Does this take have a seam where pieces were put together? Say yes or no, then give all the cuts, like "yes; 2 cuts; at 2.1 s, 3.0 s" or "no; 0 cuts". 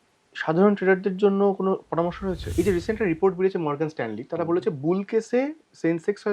yes; 1 cut; at 2.5 s